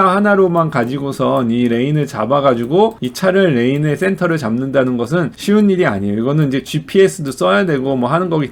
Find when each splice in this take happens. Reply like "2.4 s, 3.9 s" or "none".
none